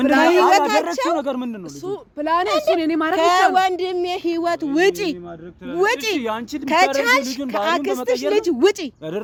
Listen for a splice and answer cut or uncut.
uncut